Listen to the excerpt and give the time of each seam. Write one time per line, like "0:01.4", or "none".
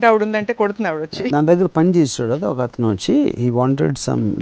0:01.3